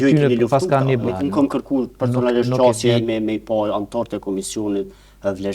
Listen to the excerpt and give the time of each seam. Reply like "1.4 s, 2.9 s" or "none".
1.1 s